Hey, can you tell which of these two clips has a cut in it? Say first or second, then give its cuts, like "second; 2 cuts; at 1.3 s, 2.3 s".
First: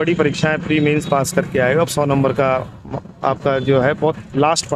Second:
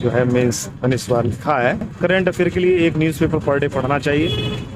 second; 1 cut; at 1.9 s